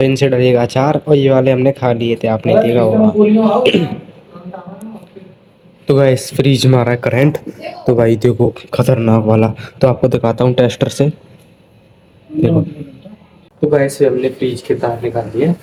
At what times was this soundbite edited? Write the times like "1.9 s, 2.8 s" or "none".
none